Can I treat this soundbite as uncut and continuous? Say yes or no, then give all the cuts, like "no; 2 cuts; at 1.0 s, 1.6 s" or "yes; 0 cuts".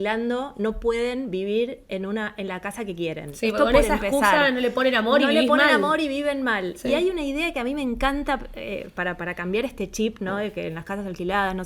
yes; 0 cuts